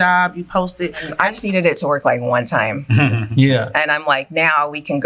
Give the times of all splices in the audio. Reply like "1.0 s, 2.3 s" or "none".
1.1 s